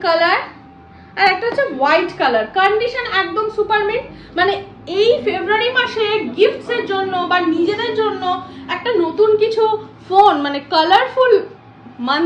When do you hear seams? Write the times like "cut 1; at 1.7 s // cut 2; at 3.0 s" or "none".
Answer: none